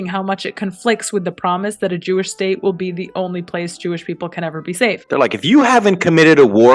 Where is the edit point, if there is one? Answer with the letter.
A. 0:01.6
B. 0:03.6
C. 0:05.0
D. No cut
C